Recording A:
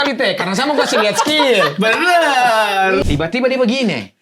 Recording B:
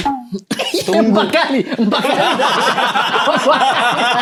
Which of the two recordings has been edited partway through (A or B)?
A